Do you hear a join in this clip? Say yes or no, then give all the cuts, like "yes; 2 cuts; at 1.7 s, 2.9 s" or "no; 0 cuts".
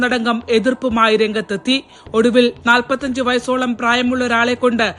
yes; 1 cut; at 3.4 s